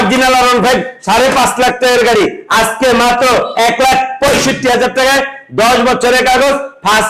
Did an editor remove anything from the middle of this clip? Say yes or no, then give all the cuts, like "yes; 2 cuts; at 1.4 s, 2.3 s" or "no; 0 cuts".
no; 0 cuts